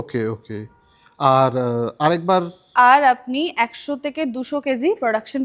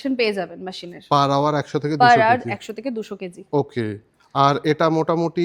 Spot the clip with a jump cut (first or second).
first